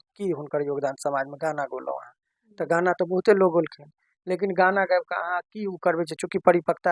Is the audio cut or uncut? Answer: uncut